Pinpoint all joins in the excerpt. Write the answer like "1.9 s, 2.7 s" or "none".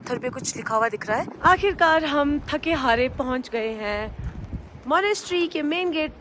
1.3 s